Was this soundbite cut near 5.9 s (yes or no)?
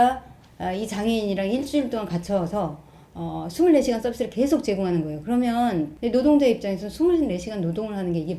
yes